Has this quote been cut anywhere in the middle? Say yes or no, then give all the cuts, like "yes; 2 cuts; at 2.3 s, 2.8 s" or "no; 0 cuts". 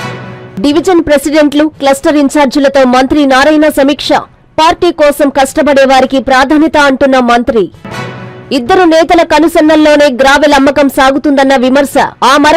no; 0 cuts